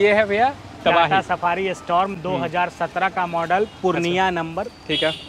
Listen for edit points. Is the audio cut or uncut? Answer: uncut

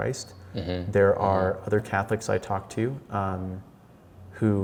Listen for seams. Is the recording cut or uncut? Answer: uncut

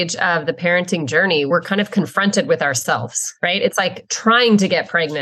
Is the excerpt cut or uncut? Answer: cut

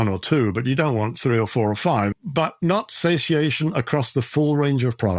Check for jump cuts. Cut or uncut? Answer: uncut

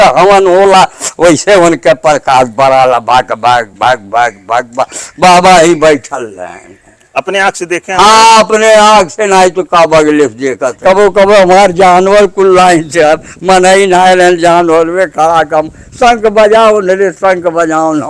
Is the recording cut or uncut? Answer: cut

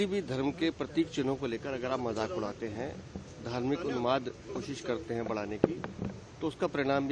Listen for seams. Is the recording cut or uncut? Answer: uncut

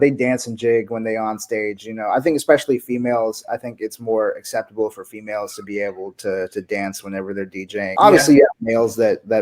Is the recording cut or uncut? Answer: cut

